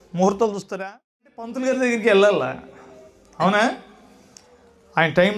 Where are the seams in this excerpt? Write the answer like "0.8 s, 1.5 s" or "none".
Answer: 1.6 s